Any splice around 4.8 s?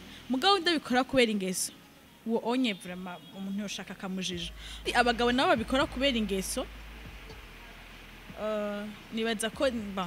yes; 1 cut; at 4.8 s

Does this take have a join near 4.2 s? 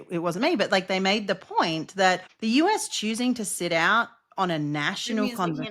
no; 1 cut; at 2.3 s

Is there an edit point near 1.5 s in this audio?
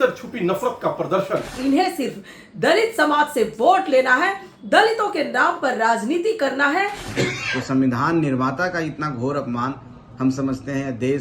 yes; 2 cuts; at 1.5 s, 7.0 s

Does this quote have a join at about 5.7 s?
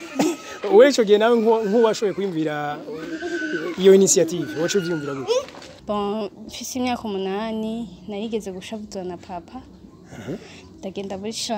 yes; 1 cut; at 5.7 s

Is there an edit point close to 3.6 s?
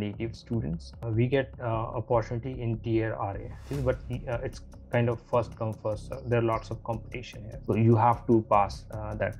yes; 3 cuts; at 1.0 s, 3.6 s, 7.5 s

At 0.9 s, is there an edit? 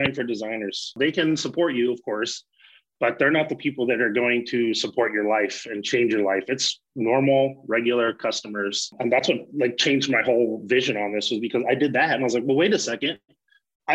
yes; 2 cuts; at 0.9 s, 8.9 s

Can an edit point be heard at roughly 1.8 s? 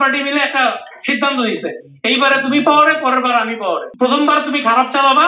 no; 1 cut; at 3.9 s

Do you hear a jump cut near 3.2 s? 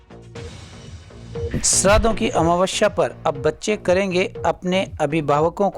no; 1 cut; at 1.5 s

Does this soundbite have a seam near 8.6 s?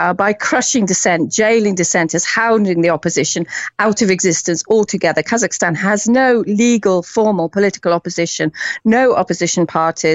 no; 0 cuts

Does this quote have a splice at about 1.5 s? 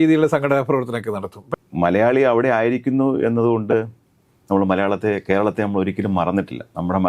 yes; 1 cut; at 1.5 s

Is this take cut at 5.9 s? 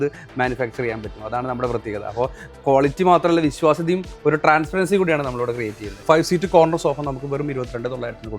yes; 1 cut; at 5.9 s

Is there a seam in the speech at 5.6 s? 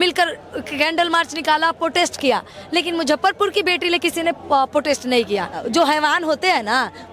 yes; 1 cut; at 5.6 s

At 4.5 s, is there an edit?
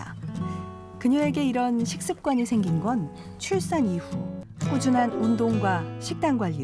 yes; 1 cut; at 4.5 s

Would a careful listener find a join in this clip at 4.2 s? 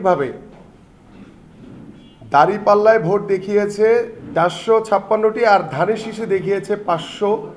yes; 1 cut; at 4.2 s

